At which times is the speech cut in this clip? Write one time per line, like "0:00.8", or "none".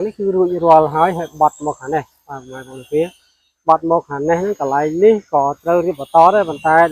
none